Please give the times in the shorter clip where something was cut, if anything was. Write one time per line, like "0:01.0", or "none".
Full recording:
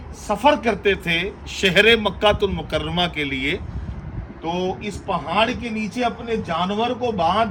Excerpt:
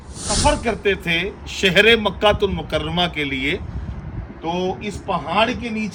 none